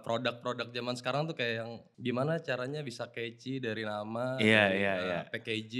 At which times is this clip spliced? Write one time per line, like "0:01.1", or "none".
0:01.8